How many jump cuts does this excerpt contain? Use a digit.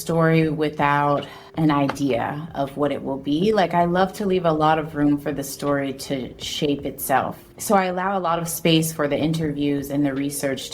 2